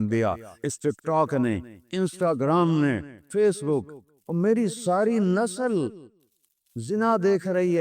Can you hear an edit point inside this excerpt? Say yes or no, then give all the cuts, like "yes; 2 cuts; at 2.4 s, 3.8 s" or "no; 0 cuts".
yes; 2 cuts; at 1.8 s, 3.1 s